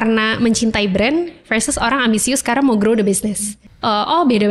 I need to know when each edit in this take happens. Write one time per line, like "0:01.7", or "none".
0:03.6